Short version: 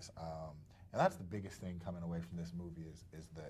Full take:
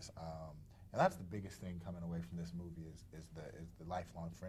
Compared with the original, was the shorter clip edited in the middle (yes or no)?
no